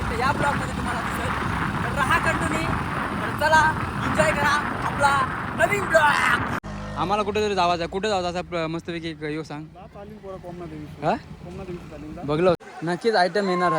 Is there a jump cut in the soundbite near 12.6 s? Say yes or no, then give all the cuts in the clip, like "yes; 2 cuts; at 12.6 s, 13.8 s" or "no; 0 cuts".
yes; 2 cuts; at 6.6 s, 12.6 s